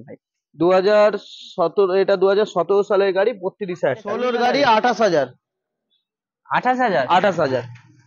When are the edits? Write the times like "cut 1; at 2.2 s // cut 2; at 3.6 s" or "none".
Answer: cut 1; at 4.2 s